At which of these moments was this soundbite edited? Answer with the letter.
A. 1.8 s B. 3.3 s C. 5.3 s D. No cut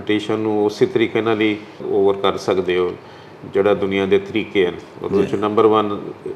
A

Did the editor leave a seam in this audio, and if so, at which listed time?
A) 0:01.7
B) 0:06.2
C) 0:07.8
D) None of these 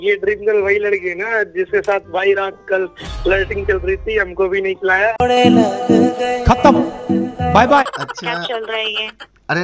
C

